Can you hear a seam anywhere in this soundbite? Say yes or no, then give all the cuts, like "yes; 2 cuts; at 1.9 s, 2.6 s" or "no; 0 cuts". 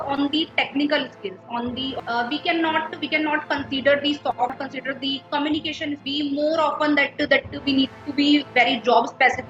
yes; 3 cuts; at 1.9 s, 4.6 s, 6.0 s